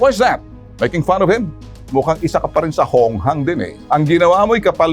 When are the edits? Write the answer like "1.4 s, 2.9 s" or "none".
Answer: 1.7 s, 3.7 s